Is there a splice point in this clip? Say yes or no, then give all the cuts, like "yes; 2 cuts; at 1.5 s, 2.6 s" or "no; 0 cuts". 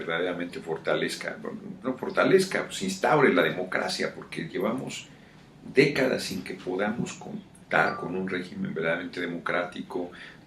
yes; 1 cut; at 9.6 s